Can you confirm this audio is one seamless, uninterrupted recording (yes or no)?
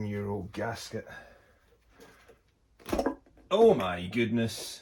yes